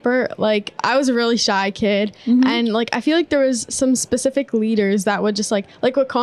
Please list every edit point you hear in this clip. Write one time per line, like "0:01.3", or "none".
none